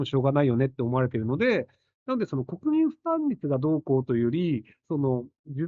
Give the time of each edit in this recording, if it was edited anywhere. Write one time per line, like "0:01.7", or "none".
none